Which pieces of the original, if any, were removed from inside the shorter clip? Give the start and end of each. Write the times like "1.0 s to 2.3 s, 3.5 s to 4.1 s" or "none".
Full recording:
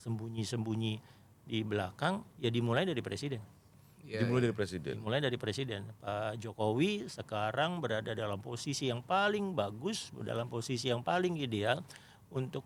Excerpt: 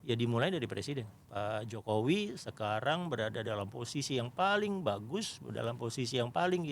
3.6 s to 5.9 s

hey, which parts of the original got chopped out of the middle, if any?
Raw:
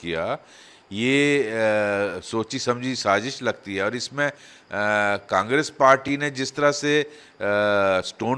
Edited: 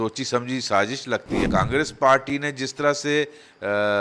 3.8 s to 5.2 s

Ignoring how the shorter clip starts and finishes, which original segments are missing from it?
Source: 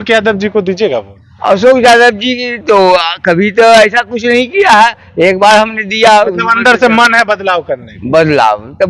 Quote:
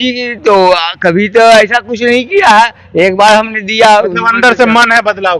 none

